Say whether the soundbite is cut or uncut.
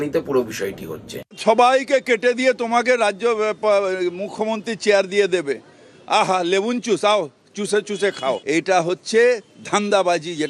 cut